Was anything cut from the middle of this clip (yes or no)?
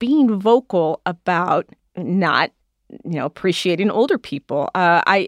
yes